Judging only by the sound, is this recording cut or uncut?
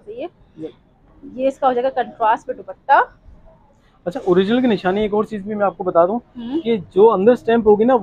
uncut